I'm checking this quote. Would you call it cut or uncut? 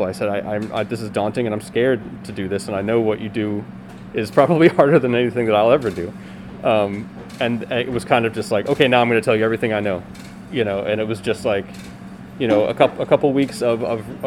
uncut